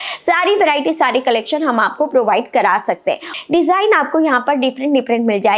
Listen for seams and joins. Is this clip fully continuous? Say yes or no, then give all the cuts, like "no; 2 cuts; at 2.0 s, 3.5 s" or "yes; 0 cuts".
no; 1 cut; at 3.3 s